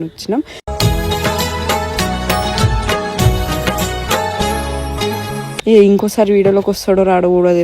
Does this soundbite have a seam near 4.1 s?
no; 1 cut; at 5.5 s

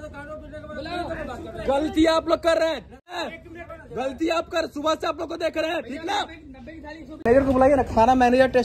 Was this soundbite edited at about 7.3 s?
yes; 2 cuts; at 3.3 s, 7.3 s

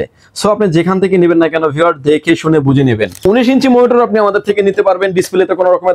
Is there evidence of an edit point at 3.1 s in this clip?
yes; 1 cut; at 3.1 s

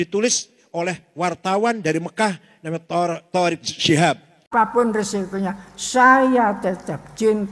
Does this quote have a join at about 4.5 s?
yes; 1 cut; at 4.5 s

